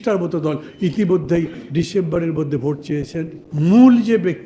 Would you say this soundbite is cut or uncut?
cut